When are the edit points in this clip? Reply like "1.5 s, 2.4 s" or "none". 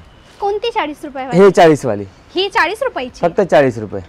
none

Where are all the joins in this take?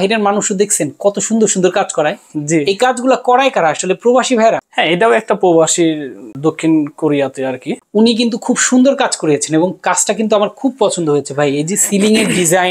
4.7 s, 6.2 s, 7.7 s

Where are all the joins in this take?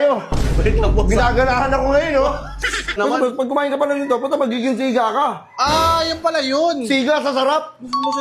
3.0 s

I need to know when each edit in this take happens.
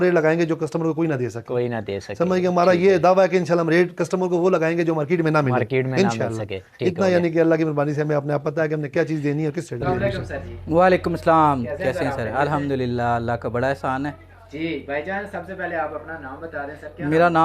9.9 s

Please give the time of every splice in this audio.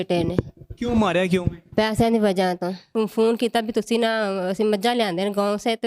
2.9 s

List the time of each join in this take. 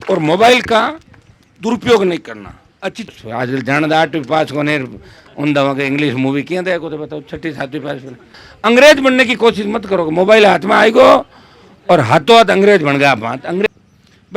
3.1 s, 8.4 s, 13.7 s

